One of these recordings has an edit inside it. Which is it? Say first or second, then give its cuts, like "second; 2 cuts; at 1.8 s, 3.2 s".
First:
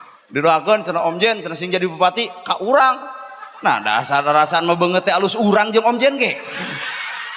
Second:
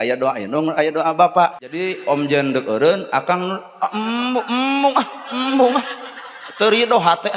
second; 1 cut; at 1.7 s